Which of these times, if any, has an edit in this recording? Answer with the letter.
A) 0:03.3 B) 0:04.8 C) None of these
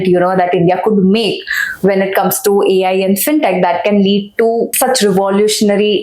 B